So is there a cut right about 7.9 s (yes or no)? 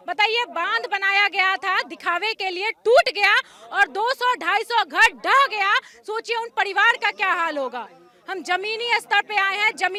no